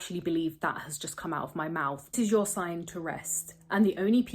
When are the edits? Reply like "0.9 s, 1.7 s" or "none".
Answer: 2.1 s